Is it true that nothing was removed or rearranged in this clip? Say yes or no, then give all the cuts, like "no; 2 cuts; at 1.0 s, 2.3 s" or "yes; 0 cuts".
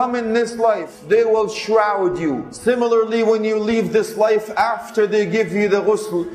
no; 2 cuts; at 0.9 s, 2.5 s